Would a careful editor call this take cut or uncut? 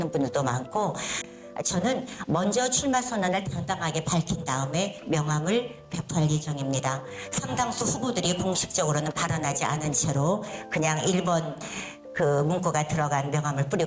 cut